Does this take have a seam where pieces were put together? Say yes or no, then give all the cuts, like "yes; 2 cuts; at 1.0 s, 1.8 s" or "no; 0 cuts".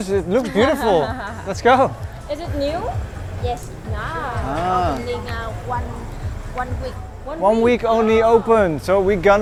no; 0 cuts